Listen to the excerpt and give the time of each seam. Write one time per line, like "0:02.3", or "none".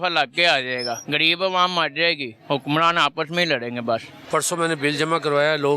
0:01.0
0:02.3
0:04.1